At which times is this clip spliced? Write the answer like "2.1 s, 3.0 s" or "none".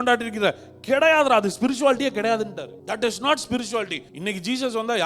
2.7 s, 4.1 s